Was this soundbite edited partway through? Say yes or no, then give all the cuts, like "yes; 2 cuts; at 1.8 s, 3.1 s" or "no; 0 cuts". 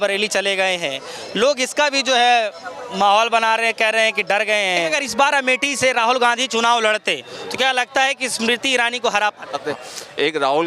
yes; 2 cuts; at 5.0 s, 9.6 s